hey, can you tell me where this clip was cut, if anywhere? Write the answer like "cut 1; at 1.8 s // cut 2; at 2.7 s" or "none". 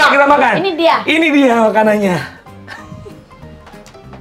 none